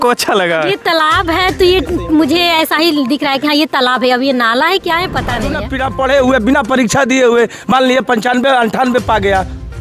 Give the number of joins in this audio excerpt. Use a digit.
1